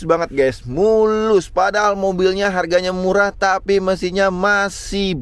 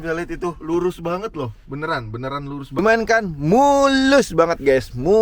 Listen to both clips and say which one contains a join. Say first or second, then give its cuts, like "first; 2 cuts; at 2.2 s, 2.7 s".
second; 1 cut; at 2.8 s